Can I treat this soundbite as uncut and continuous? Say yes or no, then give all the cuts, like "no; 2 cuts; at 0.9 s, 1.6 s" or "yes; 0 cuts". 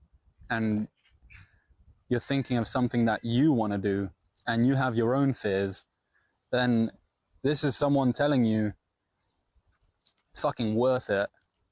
yes; 0 cuts